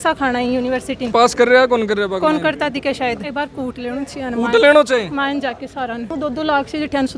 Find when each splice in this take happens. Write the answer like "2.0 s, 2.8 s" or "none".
1.1 s, 3.2 s, 6.1 s